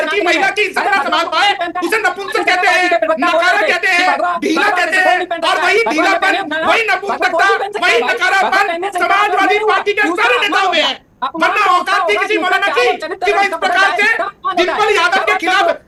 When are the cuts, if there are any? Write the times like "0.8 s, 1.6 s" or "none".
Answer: none